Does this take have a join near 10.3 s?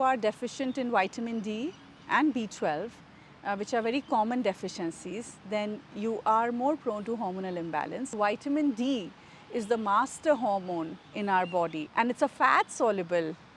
no; 2 cuts; at 8.1 s, 11.8 s

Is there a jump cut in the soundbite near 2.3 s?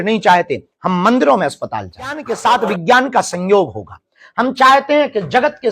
yes; 1 cut; at 2.3 s

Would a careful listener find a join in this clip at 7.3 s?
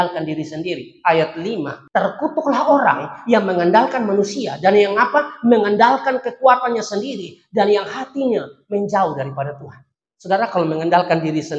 no; 1 cut; at 1.8 s

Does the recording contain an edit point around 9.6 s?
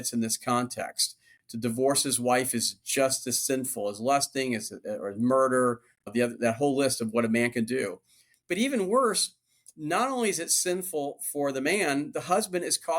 no; 1 cut; at 5.9 s

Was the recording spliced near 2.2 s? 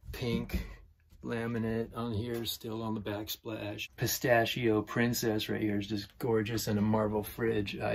no; 1 cut; at 3.8 s

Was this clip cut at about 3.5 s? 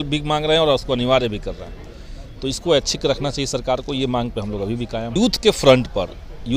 no; 1 cut; at 5.1 s

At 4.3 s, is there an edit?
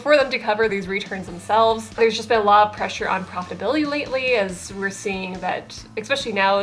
no; 2 cuts; at 0.7 s, 2.0 s

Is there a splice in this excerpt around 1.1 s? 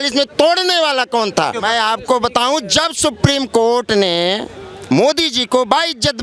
no; 0 cuts

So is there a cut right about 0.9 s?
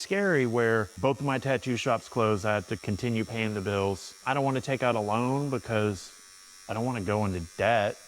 yes; 2 cuts; at 0.9 s, 4.1 s

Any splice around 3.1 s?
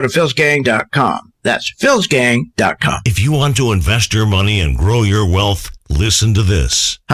yes; 1 cut; at 3.1 s

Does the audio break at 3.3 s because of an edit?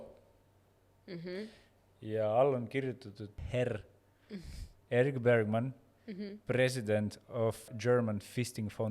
yes; 2 cuts; at 3.3 s, 7.7 s

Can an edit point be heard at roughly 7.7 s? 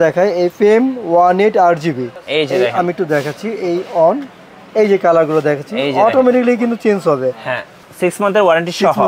yes; 2 cuts; at 2.1 s, 7.7 s

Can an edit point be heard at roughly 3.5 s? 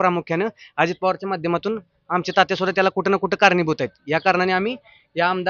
no; 0 cuts

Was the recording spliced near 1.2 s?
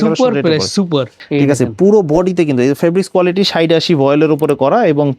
yes; 1 cut; at 1.2 s

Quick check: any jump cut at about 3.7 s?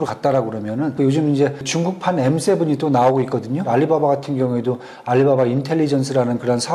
yes; 3 cuts; at 0.9 s, 1.7 s, 3.7 s

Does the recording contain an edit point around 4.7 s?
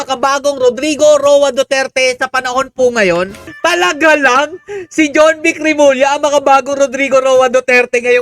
no; 1 cut; at 3.4 s

